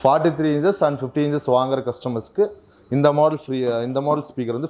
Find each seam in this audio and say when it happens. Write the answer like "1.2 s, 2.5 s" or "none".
none